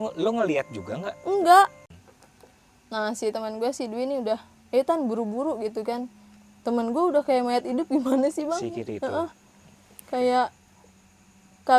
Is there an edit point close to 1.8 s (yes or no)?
yes